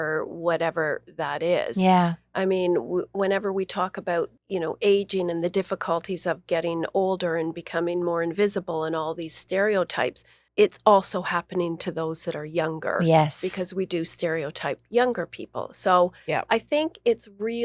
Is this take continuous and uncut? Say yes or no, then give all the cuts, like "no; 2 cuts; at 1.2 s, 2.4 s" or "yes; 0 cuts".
no; 2 cuts; at 4.4 s, 10.4 s